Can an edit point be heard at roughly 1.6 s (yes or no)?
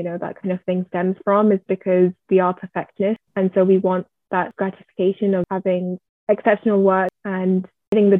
no